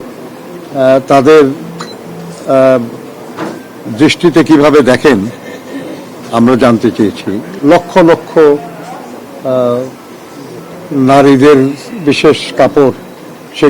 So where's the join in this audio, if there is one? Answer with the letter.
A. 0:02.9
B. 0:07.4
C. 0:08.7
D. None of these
B